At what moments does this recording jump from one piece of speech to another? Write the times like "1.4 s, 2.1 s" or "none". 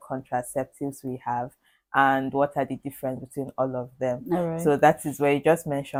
none